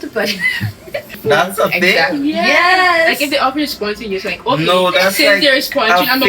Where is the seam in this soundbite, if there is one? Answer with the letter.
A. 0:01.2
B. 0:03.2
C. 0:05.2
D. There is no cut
A